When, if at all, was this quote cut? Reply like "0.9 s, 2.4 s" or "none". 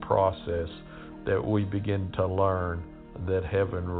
2.1 s